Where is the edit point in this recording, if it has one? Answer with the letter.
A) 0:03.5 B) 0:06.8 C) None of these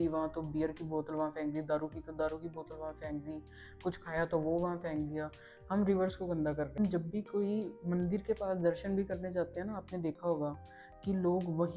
B